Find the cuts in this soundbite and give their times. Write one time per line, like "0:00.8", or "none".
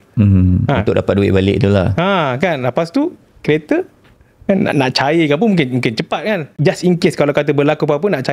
0:06.5